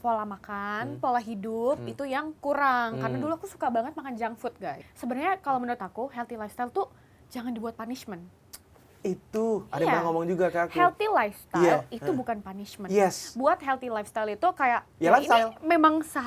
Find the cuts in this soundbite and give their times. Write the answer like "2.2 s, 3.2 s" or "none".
4.7 s